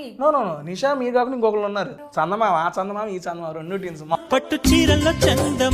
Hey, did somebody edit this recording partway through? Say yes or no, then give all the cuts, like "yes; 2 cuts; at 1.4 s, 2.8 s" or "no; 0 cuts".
yes; 2 cuts; at 2.0 s, 4.2 s